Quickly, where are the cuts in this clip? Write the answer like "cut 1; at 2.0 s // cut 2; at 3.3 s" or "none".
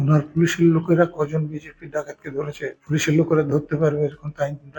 cut 1; at 2.8 s